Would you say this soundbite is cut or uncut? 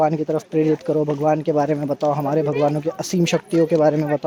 uncut